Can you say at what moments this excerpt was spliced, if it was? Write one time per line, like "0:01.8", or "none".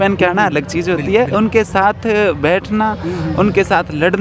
none